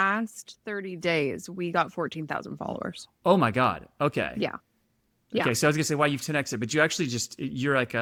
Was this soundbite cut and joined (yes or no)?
no